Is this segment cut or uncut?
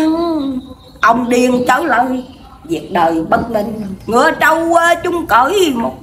cut